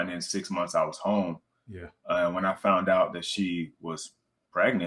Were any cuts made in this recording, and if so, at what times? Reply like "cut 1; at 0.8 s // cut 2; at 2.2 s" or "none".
none